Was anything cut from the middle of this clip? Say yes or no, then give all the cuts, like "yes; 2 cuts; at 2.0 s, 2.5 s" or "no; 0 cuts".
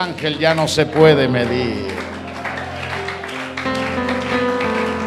no; 0 cuts